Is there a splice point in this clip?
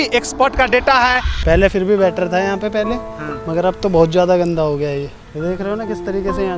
yes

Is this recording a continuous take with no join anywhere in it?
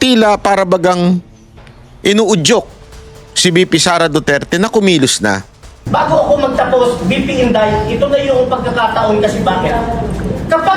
no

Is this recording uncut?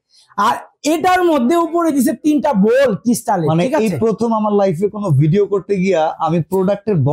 yes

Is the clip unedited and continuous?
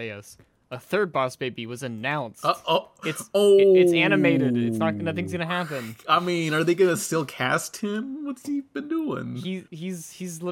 no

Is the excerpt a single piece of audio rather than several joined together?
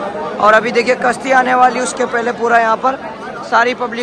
yes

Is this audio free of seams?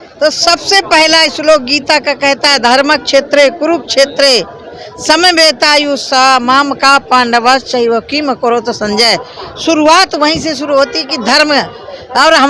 yes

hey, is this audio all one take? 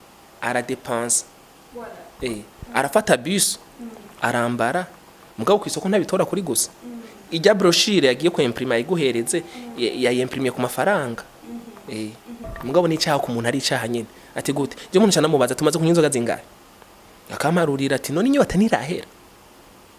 no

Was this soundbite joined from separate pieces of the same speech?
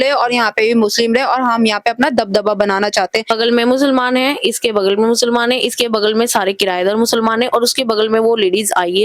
yes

